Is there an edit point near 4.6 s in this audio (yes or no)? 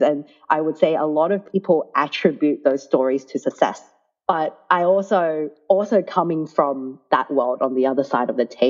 no